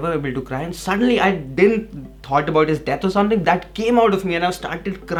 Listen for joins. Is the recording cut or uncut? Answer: uncut